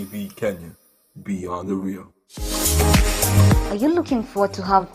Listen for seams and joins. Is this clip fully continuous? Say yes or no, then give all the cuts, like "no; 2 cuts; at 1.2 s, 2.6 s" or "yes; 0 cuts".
no; 1 cut; at 2.5 s